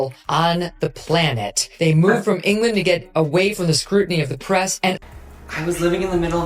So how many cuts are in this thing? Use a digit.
1